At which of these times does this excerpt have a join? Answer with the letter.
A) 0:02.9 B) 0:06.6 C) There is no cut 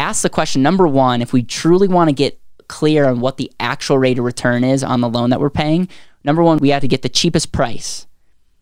B